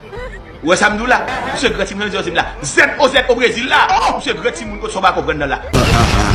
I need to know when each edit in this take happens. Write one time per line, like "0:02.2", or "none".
none